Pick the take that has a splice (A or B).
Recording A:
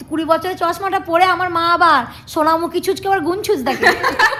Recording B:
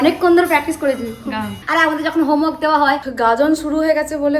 B